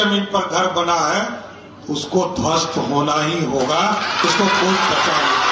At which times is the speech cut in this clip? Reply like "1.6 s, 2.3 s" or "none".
none

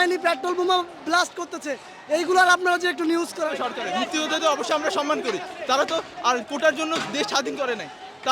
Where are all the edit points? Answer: 3.4 s

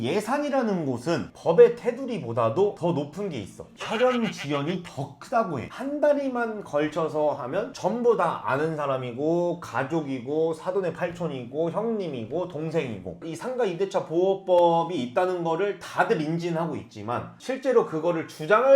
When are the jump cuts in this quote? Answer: 1.3 s, 5.6 s, 13.2 s

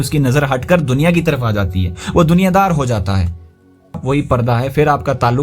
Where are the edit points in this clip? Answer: 4.0 s

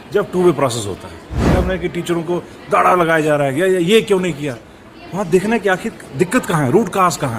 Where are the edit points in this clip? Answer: 1.5 s

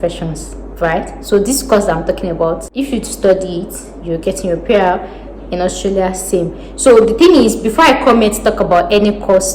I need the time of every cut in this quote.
2.7 s

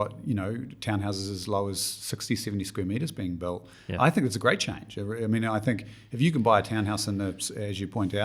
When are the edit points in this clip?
none

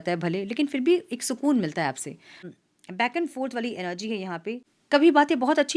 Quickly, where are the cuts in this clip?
2.4 s, 4.6 s

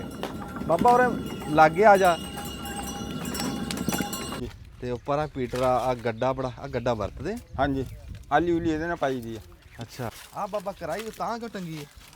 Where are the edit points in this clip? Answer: 4.4 s, 10.2 s

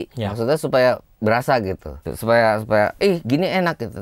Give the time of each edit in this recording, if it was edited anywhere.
1.1 s

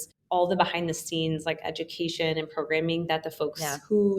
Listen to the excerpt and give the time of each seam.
none

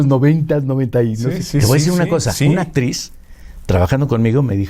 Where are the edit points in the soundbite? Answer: 1.3 s

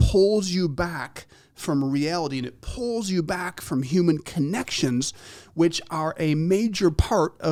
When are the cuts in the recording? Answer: none

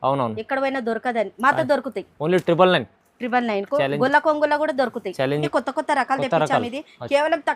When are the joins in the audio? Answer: 5.5 s

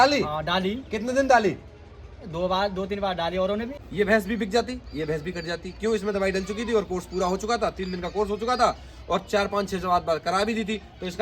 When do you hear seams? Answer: 3.7 s

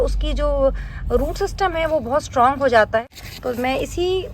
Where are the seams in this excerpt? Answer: 3.0 s

